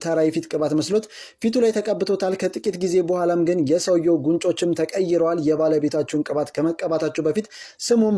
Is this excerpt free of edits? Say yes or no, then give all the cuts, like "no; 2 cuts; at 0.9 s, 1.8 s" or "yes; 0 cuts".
yes; 0 cuts